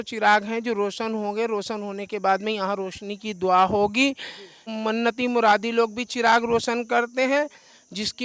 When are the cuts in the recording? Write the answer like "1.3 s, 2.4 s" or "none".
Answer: 4.7 s